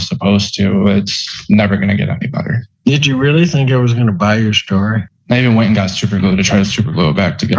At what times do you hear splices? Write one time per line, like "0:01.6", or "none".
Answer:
0:02.6
0:05.1